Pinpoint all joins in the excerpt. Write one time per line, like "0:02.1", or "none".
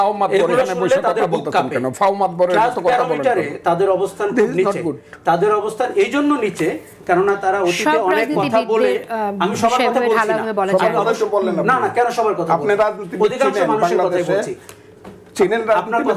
none